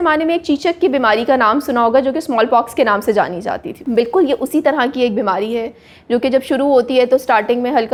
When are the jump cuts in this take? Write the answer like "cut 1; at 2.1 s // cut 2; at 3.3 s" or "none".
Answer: none